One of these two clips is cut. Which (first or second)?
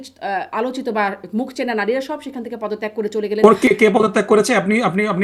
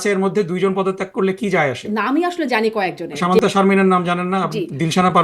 second